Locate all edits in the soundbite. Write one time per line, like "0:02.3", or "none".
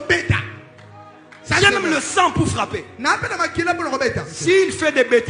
0:04.3